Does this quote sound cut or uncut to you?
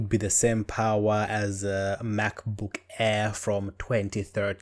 uncut